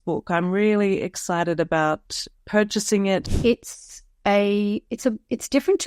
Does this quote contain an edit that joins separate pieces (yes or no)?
yes